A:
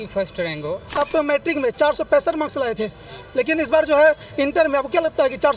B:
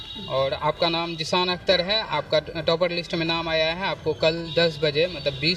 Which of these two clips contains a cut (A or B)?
A